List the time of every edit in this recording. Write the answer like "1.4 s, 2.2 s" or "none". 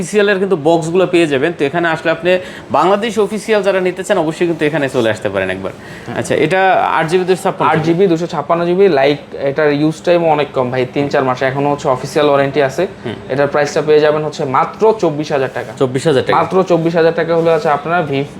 none